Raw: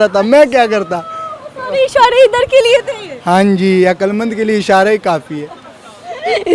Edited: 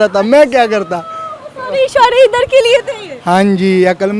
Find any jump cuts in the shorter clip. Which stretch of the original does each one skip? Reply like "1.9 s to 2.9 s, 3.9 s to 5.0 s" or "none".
none